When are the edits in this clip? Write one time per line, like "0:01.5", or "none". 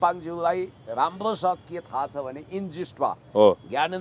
none